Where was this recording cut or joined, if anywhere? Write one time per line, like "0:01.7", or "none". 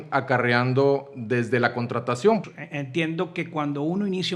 0:02.4